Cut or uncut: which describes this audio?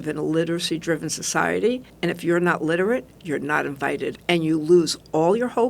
cut